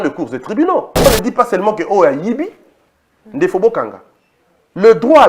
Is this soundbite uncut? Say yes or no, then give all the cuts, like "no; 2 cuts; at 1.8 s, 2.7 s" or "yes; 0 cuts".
no; 1 cut; at 1.1 s